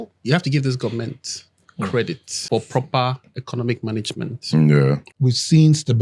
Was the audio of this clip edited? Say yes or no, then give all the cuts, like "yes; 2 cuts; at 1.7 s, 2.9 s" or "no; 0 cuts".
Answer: yes; 2 cuts; at 2.4 s, 5.1 s